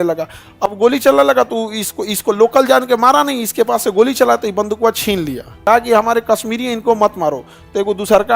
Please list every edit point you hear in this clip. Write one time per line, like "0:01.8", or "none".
0:05.6